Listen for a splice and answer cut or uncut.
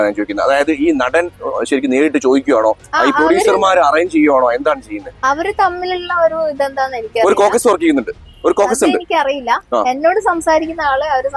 uncut